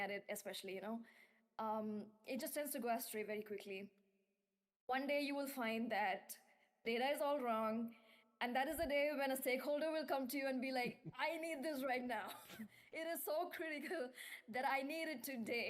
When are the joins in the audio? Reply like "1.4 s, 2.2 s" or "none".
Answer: none